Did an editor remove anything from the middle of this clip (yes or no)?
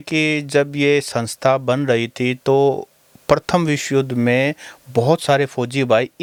no